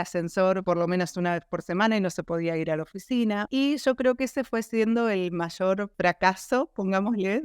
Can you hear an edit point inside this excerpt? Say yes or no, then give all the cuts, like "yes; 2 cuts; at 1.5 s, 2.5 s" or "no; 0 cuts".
yes; 1 cut; at 3.5 s